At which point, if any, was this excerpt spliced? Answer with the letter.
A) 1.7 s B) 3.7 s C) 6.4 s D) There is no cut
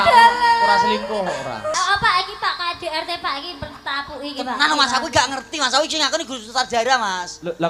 A